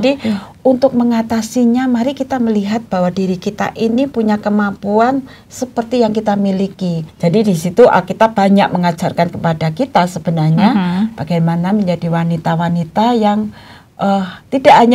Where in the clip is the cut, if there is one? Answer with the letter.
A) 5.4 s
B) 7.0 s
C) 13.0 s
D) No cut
B